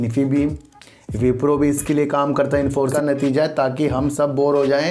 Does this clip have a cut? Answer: yes; 1 cut; at 2.8 s

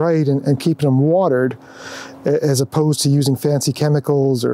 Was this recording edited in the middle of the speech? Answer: no; 0 cuts

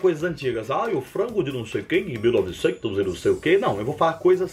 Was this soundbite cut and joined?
no; 0 cuts

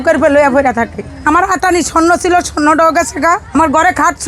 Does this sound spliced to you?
yes; 2 cuts; at 1.0 s, 3.4 s

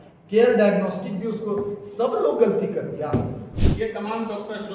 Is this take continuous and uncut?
no; 1 cut; at 3.6 s

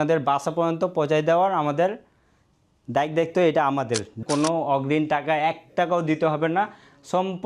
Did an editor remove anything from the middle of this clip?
yes; 1 cut; at 4.2 s

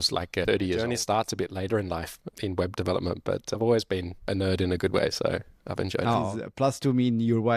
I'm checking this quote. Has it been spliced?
yes; 2 cuts; at 0.8 s, 6.4 s

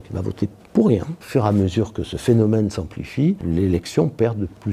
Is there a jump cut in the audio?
yes; 2 cuts; at 1.2 s, 3.4 s

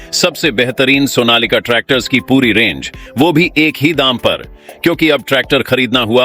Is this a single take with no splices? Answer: yes; 0 cuts

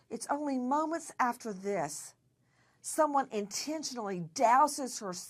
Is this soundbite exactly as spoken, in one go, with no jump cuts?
yes; 0 cuts

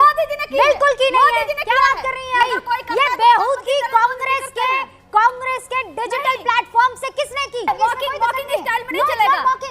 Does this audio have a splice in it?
yes; 2 cuts; at 2.4 s, 7.7 s

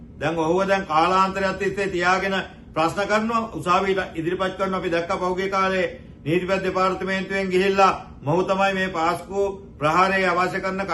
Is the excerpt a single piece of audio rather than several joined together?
yes; 0 cuts

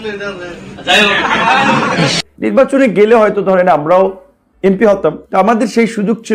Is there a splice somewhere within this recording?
yes; 1 cut; at 2.2 s

